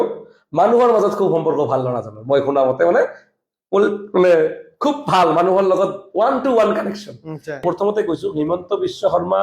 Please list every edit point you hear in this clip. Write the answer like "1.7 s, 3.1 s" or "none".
7.6 s

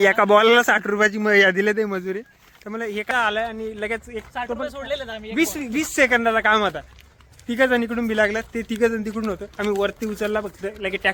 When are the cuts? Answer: none

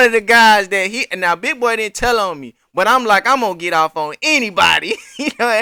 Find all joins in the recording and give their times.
none

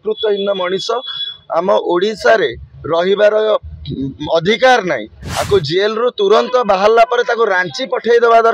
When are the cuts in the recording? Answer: none

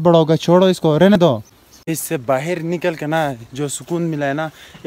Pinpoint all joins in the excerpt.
1.2 s

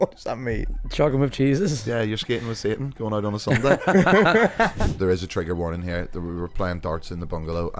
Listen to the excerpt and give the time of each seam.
4.7 s

